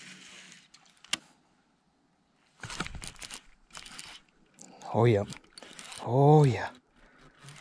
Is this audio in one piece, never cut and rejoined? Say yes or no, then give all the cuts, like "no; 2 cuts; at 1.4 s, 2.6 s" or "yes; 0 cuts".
no; 1 cut; at 1.2 s